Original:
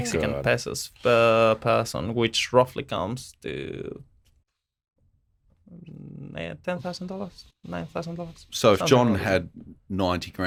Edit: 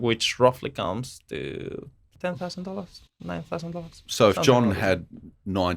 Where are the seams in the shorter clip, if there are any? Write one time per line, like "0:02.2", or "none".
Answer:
0:02.1